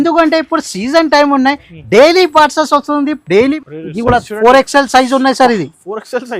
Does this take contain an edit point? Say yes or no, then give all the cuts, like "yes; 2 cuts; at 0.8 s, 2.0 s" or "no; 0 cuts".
yes; 1 cut; at 3.6 s